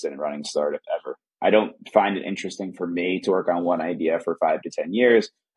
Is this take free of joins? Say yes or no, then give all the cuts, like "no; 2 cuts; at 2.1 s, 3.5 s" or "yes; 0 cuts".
no; 1 cut; at 1.2 s